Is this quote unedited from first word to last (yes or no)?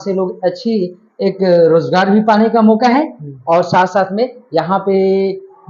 yes